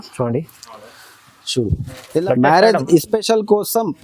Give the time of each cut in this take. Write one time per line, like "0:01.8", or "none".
0:02.2